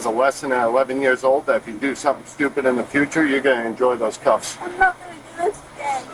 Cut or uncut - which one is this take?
uncut